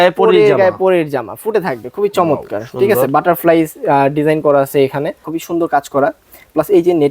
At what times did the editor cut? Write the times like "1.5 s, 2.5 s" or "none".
5.3 s